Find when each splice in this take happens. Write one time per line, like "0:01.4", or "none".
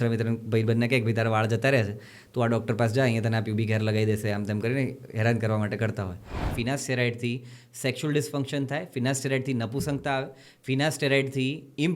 0:06.5